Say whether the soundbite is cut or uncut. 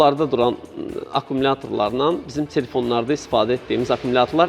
uncut